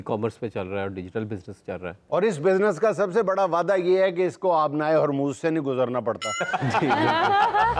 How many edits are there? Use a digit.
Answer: 1